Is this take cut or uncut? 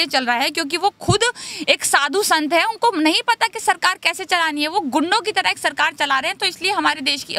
uncut